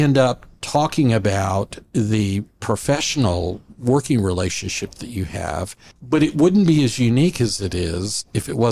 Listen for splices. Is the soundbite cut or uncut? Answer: cut